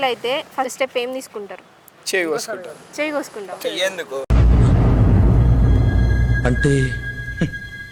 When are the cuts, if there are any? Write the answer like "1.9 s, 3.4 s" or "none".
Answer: none